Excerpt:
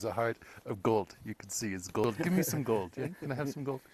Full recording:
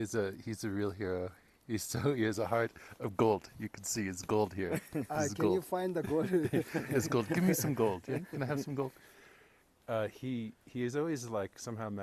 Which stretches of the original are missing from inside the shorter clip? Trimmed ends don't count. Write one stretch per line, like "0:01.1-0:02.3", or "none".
0:04.4-0:07.2